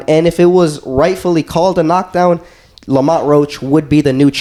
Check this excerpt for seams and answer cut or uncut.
uncut